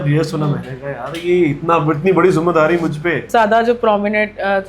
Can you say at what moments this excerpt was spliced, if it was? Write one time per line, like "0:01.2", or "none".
0:03.3